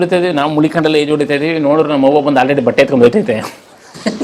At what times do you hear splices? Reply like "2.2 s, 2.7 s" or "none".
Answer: none